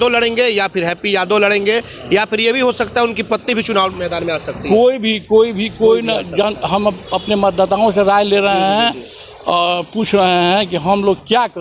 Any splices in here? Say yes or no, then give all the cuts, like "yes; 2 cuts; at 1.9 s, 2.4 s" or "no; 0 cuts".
no; 0 cuts